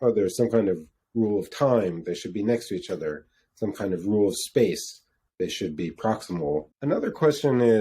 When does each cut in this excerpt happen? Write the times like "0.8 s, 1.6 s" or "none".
6.7 s